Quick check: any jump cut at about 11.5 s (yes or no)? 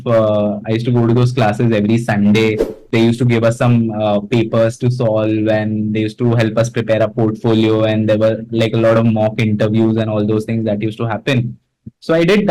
no